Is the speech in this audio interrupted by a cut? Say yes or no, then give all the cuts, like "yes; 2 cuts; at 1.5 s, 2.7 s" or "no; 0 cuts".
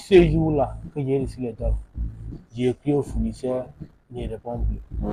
no; 0 cuts